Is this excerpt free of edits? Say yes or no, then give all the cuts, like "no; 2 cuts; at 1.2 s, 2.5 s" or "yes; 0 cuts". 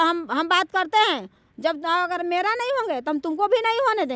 yes; 0 cuts